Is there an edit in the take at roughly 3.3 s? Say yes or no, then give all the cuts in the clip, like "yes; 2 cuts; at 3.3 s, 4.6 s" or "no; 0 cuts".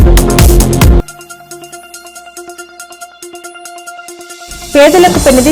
no; 1 cut; at 1.0 s